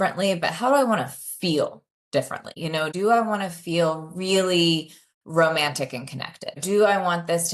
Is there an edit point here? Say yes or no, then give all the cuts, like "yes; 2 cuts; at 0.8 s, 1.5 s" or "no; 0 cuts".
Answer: yes; 2 cuts; at 2.6 s, 6.6 s